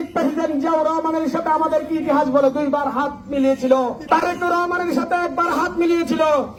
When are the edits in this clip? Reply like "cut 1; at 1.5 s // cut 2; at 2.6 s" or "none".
none